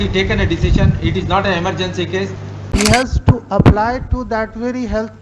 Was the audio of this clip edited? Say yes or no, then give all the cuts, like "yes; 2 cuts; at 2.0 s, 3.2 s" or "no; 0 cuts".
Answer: yes; 1 cut; at 2.8 s